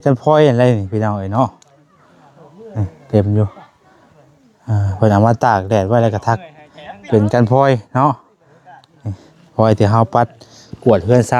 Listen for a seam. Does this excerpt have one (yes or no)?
no